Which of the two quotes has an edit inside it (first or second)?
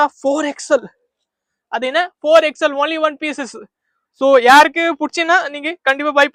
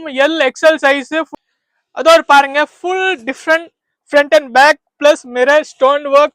second